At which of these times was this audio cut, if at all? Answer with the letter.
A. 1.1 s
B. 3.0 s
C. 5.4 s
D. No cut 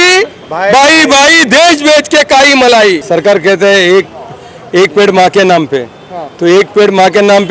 B